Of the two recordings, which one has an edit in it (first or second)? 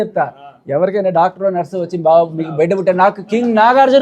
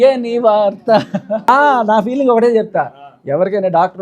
second